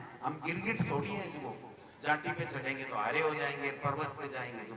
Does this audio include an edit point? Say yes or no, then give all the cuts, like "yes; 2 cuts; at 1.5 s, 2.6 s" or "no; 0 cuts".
no; 0 cuts